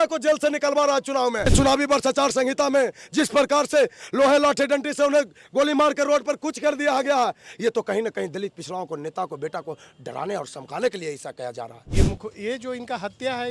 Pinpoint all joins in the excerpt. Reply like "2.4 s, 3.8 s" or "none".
1.5 s, 11.8 s